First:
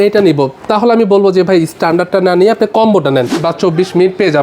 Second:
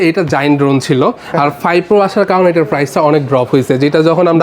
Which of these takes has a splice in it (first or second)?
first